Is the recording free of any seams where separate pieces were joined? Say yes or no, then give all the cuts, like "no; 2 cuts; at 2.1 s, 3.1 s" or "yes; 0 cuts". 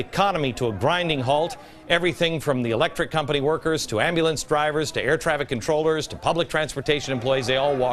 yes; 0 cuts